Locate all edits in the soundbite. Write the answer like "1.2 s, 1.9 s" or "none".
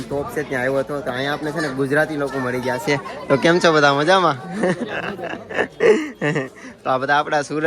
none